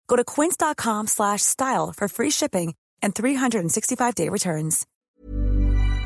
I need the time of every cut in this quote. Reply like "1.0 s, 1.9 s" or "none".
4.9 s